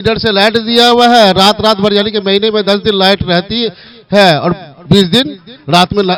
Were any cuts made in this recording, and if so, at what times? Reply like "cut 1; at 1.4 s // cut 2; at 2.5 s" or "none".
none

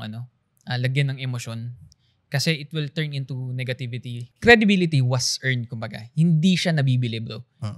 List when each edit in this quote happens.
cut 1; at 4.3 s

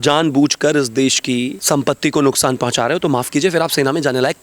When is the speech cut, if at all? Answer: cut 1; at 1.6 s

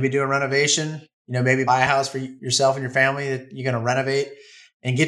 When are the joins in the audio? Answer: cut 1; at 1.7 s

